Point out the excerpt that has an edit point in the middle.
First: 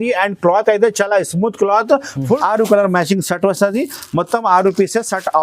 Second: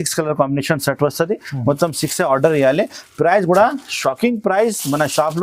first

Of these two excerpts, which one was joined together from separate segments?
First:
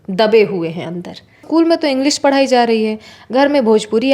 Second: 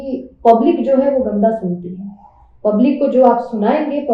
first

